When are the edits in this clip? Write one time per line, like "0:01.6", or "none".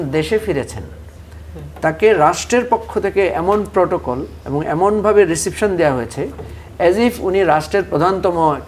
none